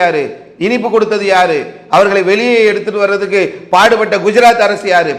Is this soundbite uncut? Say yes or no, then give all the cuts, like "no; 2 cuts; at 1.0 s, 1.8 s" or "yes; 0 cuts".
yes; 0 cuts